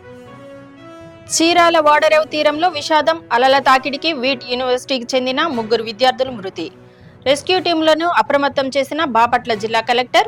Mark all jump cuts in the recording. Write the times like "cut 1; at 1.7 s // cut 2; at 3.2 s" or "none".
cut 1; at 1.4 s